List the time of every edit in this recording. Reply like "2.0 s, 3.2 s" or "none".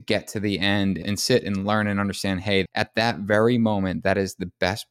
1.0 s, 2.7 s